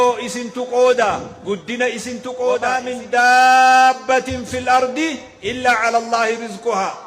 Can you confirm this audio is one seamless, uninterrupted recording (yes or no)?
no